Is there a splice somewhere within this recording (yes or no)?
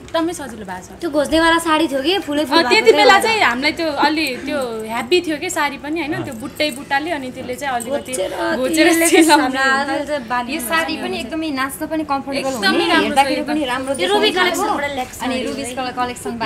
no